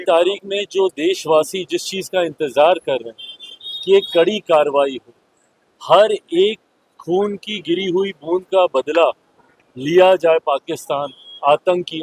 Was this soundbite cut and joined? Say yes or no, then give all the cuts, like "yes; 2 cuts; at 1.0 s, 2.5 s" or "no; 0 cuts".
no; 0 cuts